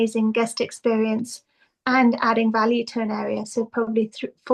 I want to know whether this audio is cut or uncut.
uncut